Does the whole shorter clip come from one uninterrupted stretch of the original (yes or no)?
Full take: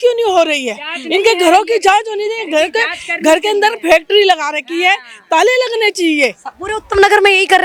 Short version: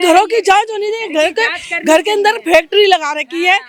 yes